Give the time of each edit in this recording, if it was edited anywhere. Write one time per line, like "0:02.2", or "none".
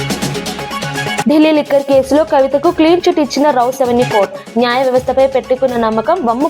0:00.9